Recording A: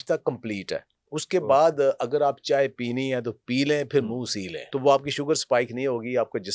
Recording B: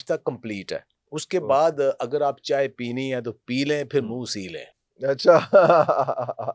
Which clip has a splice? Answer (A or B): A